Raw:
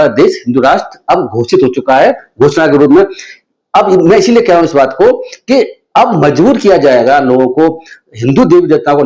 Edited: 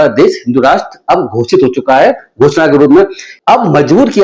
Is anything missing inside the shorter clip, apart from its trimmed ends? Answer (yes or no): yes